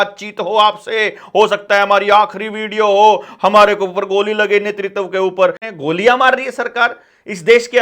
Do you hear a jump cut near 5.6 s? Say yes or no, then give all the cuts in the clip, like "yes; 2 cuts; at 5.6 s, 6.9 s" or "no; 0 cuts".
yes; 1 cut; at 5.6 s